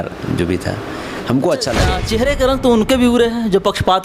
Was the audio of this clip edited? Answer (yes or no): yes